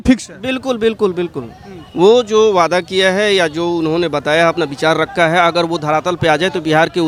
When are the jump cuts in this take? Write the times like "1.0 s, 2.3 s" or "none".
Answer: none